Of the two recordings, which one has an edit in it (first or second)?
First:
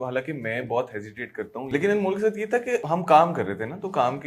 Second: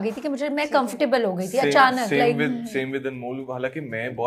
first